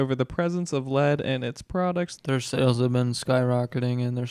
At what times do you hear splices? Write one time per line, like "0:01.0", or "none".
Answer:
0:02.1